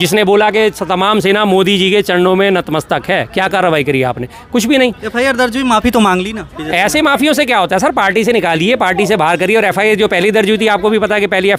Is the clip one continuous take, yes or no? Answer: yes